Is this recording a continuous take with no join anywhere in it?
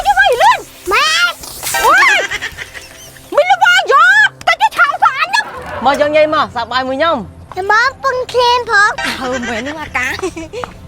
no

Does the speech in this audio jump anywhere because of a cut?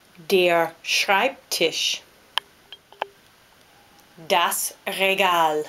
no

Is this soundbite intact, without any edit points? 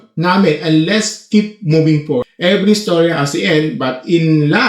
no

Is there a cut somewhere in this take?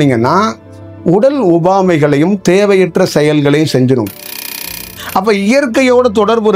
yes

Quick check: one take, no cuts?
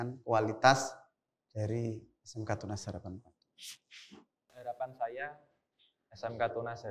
no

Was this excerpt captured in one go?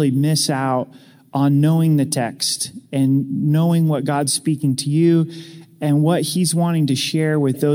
yes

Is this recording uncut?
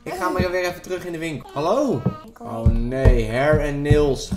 no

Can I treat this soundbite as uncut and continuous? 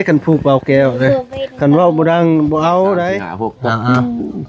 no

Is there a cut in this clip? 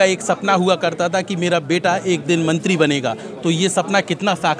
no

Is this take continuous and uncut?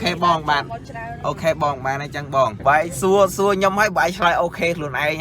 no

